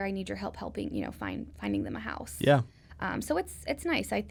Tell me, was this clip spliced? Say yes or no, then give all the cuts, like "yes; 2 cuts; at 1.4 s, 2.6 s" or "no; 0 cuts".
no; 0 cuts